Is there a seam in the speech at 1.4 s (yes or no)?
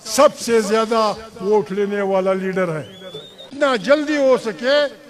no